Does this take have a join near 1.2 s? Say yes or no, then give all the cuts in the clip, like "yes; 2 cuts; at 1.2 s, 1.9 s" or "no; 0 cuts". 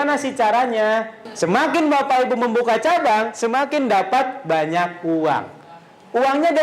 yes; 1 cut; at 1.2 s